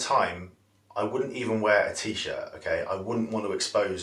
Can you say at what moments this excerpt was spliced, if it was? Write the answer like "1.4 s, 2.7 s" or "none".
none

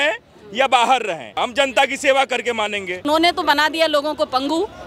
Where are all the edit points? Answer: 1.3 s, 2.9 s

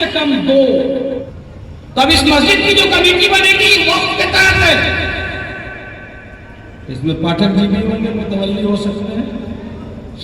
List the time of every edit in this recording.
1.2 s

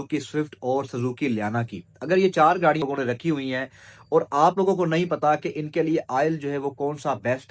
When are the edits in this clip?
2.8 s

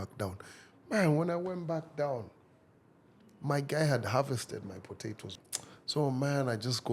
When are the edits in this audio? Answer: 5.3 s

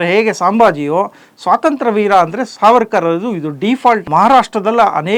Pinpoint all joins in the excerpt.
4.0 s

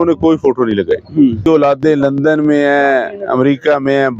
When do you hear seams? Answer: 1.5 s

